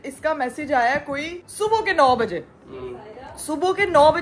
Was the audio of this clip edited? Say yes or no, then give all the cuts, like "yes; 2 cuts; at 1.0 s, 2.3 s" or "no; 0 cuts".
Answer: no; 0 cuts